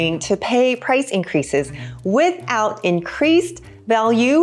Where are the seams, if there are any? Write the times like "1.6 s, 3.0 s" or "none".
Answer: none